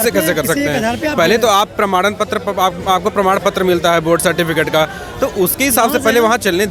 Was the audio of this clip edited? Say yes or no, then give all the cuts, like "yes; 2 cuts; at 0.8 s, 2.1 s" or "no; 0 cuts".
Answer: no; 0 cuts